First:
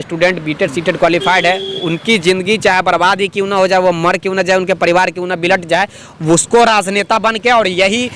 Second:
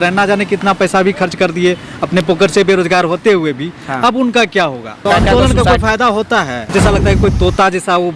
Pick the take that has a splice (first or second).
second